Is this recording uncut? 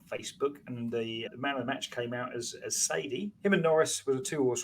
no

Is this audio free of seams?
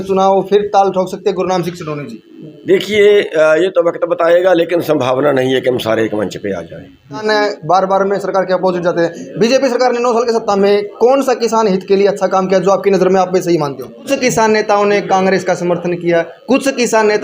no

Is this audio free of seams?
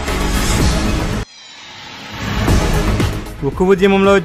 no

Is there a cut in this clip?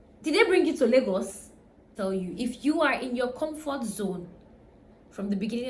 yes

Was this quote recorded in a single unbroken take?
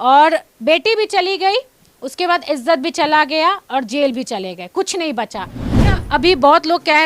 no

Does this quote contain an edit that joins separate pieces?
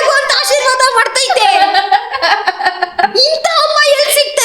yes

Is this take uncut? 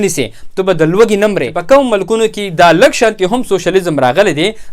no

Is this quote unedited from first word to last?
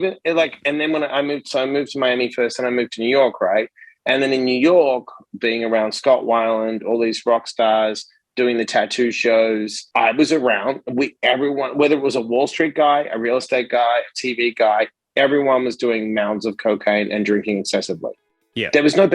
no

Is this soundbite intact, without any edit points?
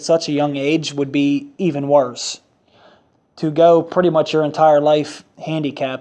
no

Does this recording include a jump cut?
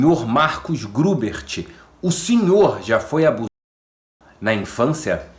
no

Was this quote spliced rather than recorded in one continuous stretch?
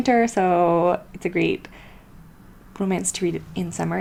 no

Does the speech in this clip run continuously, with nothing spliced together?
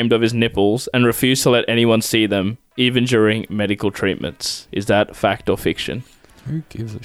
yes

